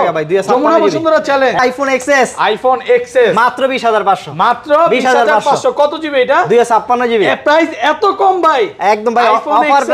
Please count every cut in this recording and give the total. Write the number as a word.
one